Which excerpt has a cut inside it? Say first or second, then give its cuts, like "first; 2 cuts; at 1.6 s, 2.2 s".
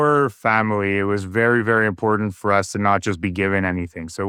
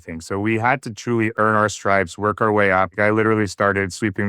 second; 2 cuts; at 1.3 s, 2.9 s